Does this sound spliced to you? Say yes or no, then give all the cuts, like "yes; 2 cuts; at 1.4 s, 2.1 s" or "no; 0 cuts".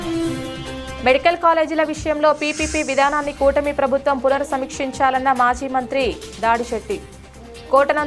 yes; 1 cut; at 0.9 s